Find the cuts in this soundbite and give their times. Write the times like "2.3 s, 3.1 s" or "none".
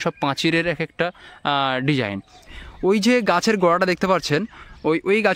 2.4 s